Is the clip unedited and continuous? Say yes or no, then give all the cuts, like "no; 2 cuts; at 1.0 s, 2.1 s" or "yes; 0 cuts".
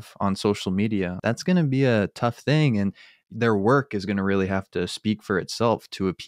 no; 1 cut; at 1.1 s